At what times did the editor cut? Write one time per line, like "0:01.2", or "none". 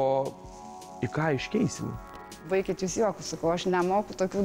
0:02.5
0:03.7